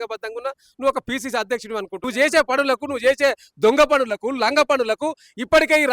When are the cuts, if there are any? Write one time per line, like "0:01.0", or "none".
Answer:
0:02.0